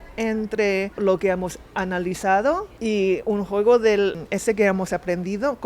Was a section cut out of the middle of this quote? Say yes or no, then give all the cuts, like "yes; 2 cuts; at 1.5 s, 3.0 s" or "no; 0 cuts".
yes; 3 cuts; at 1.0 s, 2.7 s, 4.2 s